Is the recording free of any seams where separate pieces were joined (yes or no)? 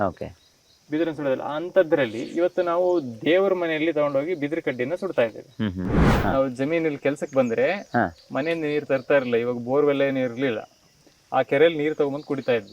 no